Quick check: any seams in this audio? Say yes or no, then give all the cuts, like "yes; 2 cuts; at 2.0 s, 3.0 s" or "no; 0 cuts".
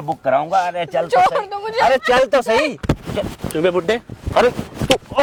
no; 0 cuts